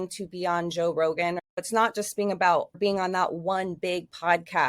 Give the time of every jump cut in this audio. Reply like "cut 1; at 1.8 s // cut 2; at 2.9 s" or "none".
cut 1; at 1.6 s // cut 2; at 2.8 s